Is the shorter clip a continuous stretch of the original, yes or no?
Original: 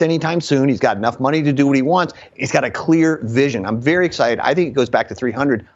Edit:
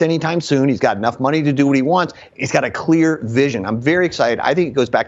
yes